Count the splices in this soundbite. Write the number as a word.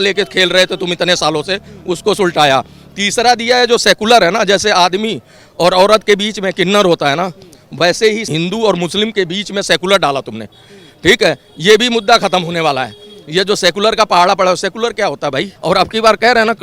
two